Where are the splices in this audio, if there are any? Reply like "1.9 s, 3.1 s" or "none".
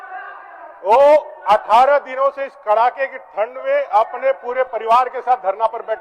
none